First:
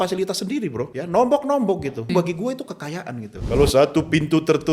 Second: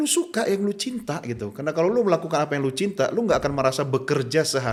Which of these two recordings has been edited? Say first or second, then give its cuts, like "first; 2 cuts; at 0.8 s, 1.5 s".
first; 3 cuts; at 0.9 s, 2.1 s, 3.3 s